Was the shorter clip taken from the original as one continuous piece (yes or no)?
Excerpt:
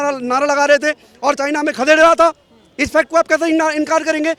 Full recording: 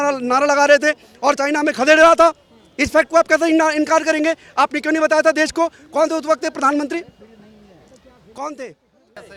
yes